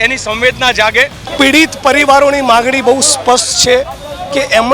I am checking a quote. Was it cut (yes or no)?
yes